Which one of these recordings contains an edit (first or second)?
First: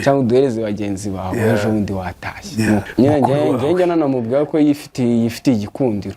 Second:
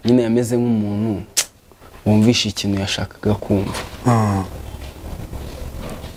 first